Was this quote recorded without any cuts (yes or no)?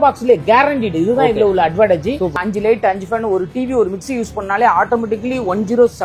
no